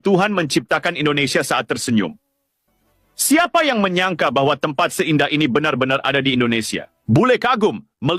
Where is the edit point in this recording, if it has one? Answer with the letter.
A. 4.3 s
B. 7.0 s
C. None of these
B